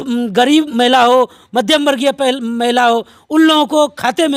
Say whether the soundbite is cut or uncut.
uncut